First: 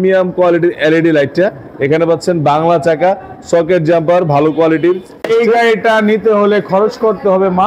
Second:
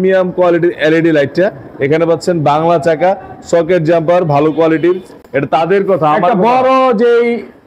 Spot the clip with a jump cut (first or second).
first